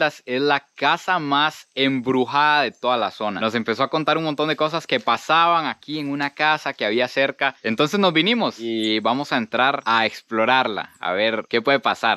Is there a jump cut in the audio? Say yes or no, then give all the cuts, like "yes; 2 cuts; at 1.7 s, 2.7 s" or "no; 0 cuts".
no; 0 cuts